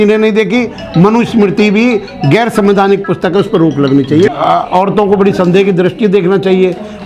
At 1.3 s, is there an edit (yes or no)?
no